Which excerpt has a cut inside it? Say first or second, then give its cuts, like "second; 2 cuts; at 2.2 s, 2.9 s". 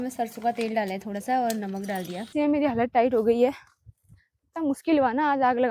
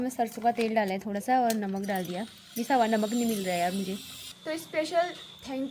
first; 1 cut; at 2.3 s